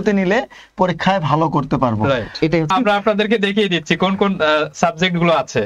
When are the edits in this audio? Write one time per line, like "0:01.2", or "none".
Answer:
0:02.7